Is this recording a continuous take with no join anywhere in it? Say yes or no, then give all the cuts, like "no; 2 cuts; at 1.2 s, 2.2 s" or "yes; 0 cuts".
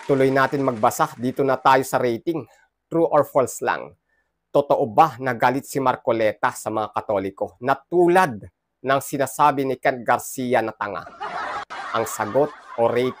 yes; 0 cuts